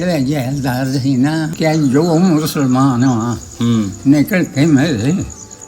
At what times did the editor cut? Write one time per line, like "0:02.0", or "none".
0:01.5